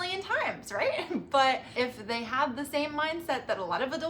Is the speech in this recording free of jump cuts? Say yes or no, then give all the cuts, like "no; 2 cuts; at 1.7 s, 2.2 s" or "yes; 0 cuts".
no; 1 cut; at 1.7 s